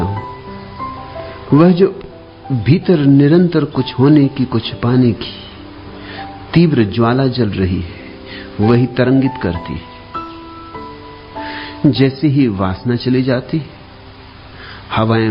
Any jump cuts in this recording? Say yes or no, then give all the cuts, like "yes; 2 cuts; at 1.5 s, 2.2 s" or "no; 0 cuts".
no; 0 cuts